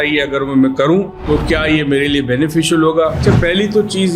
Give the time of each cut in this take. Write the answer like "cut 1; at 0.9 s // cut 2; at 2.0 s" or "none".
cut 1; at 1.2 s // cut 2; at 3.2 s